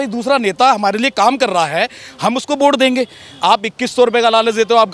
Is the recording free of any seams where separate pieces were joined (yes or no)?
yes